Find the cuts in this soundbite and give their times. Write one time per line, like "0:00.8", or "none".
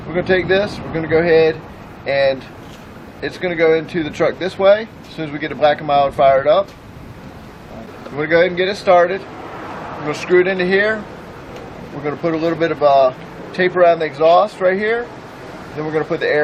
none